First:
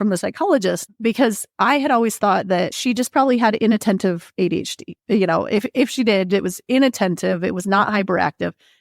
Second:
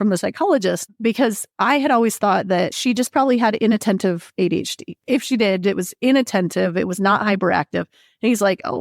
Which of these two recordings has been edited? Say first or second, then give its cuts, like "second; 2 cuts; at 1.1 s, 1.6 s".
second; 1 cut; at 5.0 s